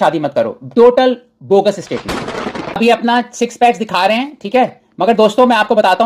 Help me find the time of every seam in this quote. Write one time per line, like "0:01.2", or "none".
0:02.6